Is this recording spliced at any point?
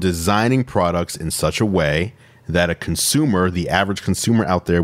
no; 0 cuts

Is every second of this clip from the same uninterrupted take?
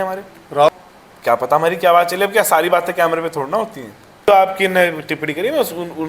no; 2 cuts; at 0.7 s, 4.2 s

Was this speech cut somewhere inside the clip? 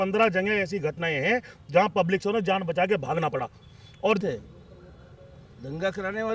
yes; 1 cut; at 4.2 s

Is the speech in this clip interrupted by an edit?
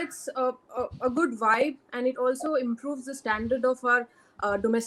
no; 0 cuts

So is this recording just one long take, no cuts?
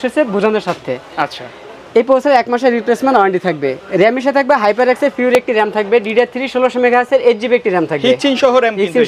yes; 0 cuts

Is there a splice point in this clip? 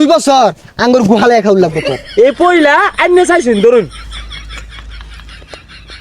yes; 1 cut; at 1.9 s

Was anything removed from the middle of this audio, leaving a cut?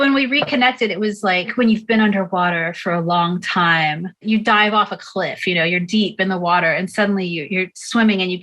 yes; 2 cuts; at 1.5 s, 4.2 s

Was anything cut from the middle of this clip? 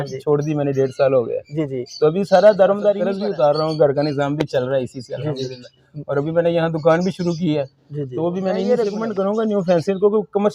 yes; 2 cuts; at 3.1 s, 8.6 s

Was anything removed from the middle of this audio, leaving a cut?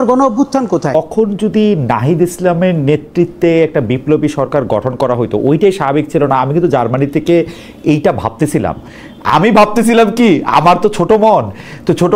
yes; 1 cut; at 0.9 s

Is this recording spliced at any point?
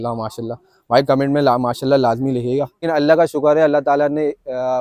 yes; 1 cut; at 2.8 s

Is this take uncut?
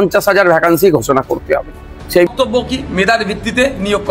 no; 1 cut; at 2.3 s

